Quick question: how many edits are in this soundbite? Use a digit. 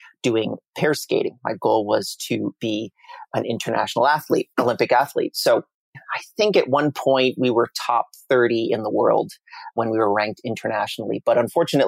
2